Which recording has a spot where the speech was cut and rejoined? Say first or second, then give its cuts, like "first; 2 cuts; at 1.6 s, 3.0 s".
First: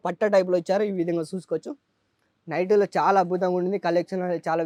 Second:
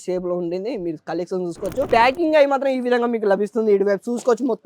second; 1 cut; at 1.9 s